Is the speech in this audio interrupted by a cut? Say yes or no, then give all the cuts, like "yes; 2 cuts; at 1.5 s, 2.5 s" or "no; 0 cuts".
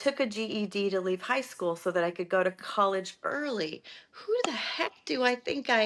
no; 0 cuts